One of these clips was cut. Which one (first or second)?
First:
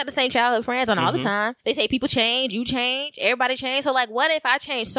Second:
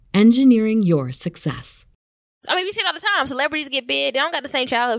second